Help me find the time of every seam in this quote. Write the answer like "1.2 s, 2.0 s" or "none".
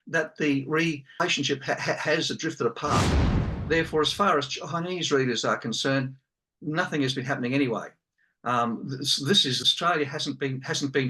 1.2 s, 3.4 s, 9.6 s